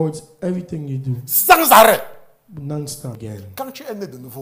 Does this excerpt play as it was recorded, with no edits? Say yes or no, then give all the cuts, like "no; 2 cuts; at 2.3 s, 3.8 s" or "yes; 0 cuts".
no; 1 cut; at 3.2 s